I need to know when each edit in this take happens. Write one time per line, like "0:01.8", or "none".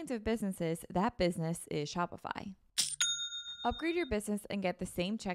0:03.2